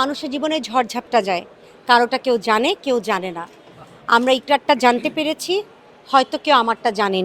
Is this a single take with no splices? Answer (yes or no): yes